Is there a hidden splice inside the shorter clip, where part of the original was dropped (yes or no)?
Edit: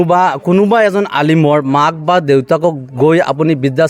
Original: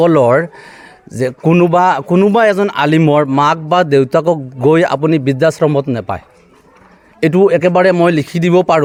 no